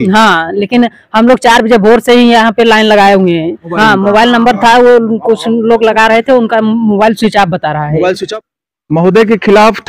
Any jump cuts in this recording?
yes; 2 cuts; at 3.6 s, 8.2 s

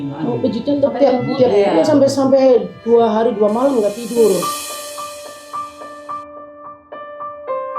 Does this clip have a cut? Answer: no; 0 cuts

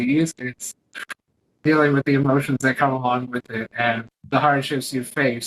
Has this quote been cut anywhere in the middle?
yes; 1 cut; at 4.1 s

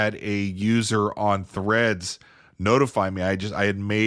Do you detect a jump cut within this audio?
no; 0 cuts

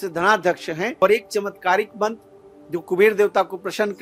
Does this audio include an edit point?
yes; 1 cut; at 1.0 s

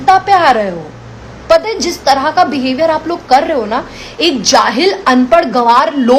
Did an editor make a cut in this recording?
no; 0 cuts

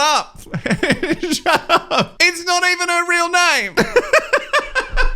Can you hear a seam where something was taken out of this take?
yes; 2 cuts; at 2.1 s, 3.6 s

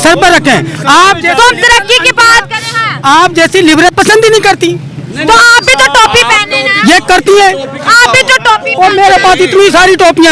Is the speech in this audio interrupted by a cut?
yes; 1 cut; at 3.9 s

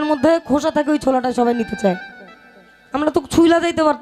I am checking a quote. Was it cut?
no; 0 cuts

